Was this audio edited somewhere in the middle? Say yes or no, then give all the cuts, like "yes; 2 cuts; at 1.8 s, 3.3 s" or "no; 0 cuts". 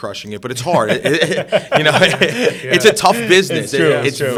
no; 0 cuts